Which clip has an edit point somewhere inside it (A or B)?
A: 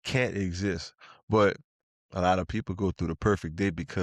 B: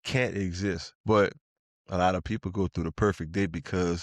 B